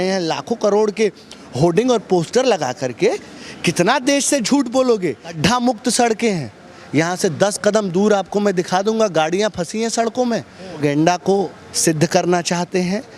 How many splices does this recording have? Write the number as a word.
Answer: two